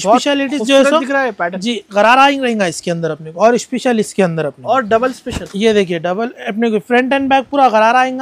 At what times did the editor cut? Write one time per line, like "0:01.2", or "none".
none